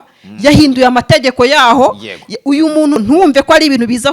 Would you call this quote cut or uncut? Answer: cut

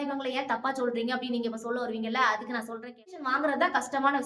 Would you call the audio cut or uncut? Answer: cut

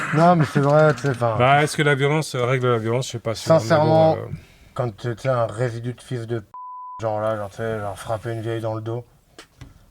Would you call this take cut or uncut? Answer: uncut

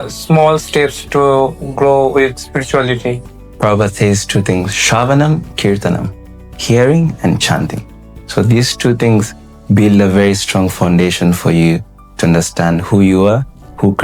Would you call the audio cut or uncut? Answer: uncut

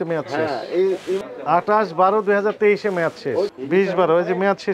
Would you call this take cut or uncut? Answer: uncut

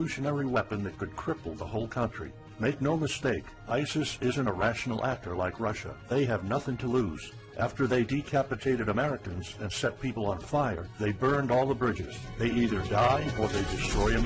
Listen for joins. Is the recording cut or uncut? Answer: cut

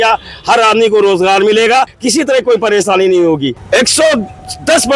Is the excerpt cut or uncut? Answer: cut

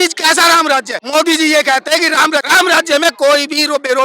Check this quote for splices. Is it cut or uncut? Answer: cut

